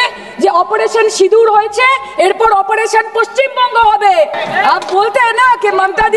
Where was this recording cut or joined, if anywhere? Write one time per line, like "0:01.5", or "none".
0:04.4

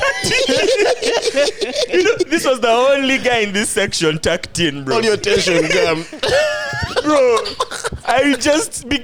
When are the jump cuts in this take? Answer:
none

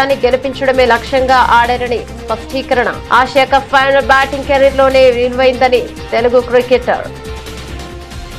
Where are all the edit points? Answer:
0:07.1

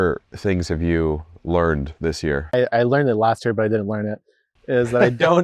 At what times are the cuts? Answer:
0:02.5

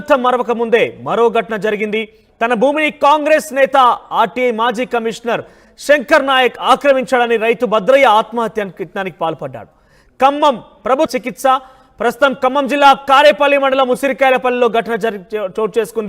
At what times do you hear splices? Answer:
0:11.1

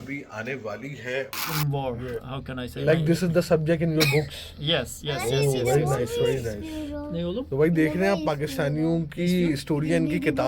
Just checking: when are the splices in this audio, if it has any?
0:01.6

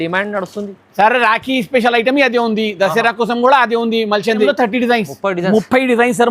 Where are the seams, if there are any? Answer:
0:04.5

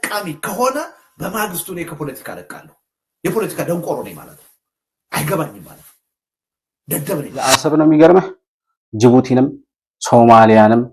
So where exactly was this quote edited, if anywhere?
0:07.5

